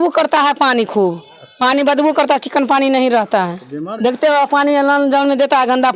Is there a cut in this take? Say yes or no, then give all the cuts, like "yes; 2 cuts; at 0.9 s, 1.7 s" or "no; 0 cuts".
no; 0 cuts